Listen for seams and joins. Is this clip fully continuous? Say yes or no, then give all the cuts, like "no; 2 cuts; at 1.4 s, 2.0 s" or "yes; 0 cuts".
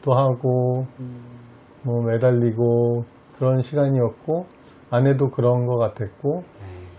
yes; 0 cuts